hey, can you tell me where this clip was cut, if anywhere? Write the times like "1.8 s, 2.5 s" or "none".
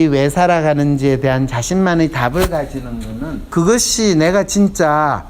3.5 s

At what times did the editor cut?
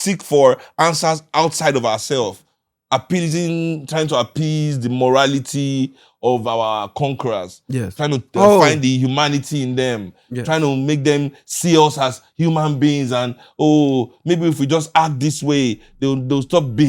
none

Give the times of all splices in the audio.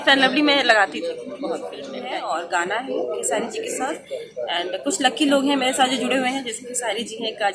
1.9 s

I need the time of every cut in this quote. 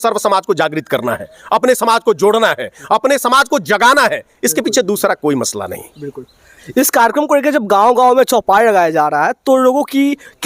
none

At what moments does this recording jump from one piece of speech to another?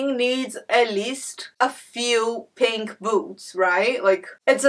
none

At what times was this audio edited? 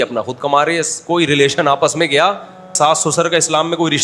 2.7 s

